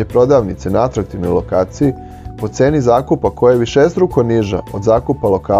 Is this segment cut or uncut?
uncut